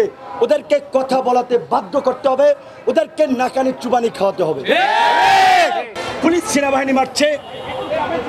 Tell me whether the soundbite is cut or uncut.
cut